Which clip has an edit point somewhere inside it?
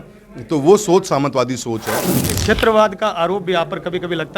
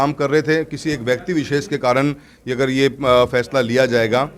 first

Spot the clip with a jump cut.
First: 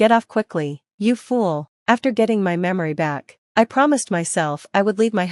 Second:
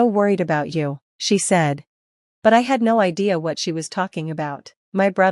first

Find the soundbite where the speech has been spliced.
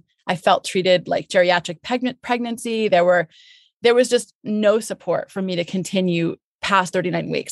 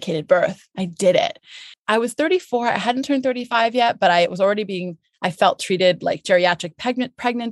second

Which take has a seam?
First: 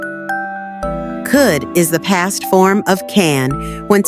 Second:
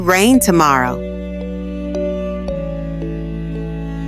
second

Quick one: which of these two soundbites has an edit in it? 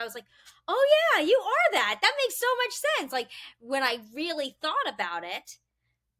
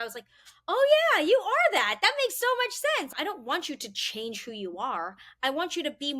second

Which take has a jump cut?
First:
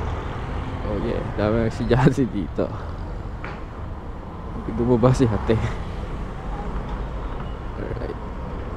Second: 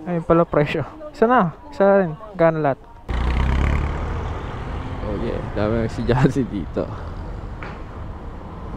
second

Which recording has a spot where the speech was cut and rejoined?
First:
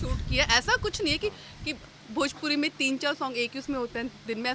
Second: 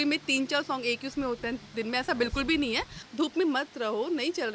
second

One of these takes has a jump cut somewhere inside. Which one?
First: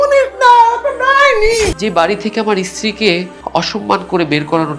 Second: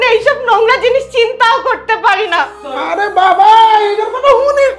first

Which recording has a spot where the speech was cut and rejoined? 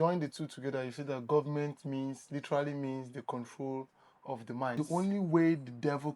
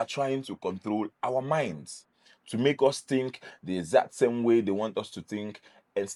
first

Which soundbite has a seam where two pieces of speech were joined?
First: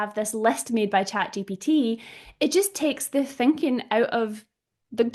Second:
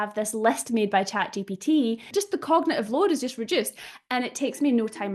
second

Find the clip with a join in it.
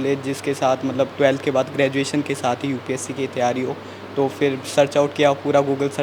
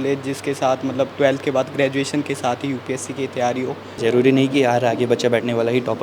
second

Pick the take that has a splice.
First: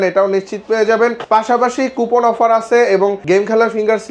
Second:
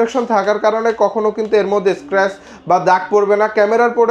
first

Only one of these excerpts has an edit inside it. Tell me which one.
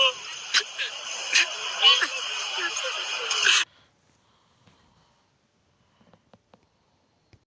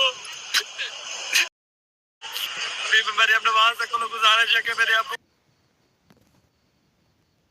second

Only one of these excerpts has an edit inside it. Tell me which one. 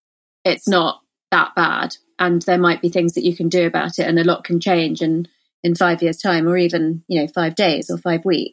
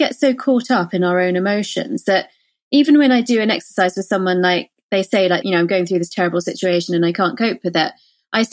second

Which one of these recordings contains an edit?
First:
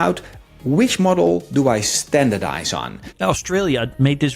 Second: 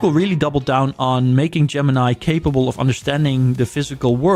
first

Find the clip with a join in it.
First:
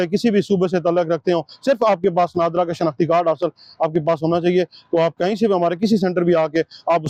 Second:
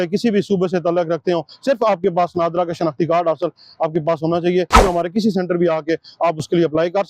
second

